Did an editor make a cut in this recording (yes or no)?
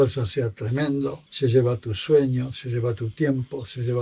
no